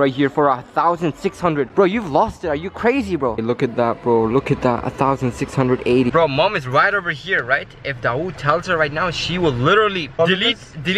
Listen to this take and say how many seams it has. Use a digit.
2